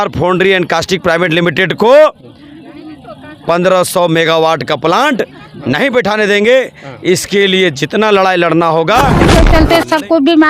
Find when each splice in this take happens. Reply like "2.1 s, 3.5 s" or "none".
9.3 s